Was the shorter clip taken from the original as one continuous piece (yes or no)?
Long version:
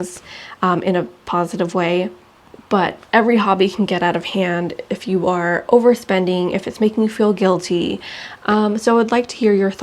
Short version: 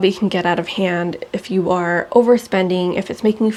yes